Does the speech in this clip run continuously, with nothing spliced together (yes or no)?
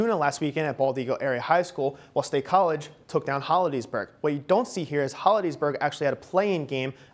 yes